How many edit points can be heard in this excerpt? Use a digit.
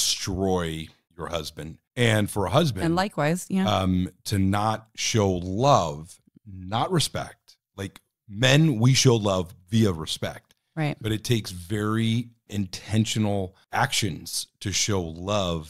3